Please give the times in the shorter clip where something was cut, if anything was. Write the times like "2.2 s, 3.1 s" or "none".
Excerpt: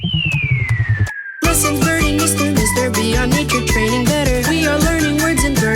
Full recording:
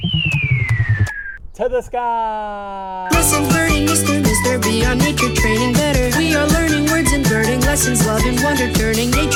1.4 s